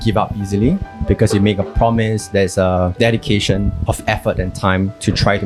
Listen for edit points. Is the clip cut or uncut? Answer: uncut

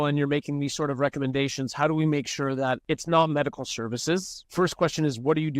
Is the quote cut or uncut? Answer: cut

